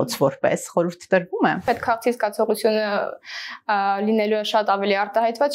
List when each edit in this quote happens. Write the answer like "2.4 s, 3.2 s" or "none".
1.7 s